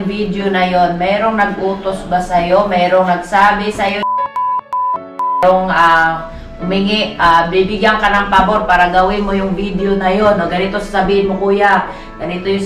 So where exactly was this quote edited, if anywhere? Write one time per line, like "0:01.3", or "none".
none